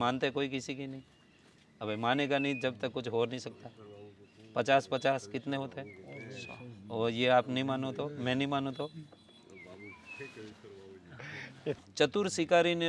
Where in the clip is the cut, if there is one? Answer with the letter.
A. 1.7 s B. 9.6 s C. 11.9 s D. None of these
C